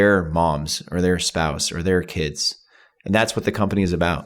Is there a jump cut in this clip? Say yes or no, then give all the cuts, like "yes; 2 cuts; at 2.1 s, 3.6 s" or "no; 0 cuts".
no; 0 cuts